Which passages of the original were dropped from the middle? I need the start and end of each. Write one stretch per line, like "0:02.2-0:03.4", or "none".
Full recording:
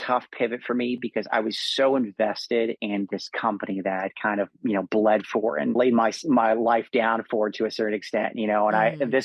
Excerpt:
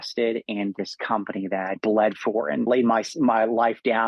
0:04.1-0:04.9